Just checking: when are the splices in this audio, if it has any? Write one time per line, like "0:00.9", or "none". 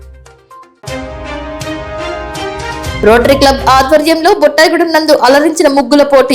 0:03.0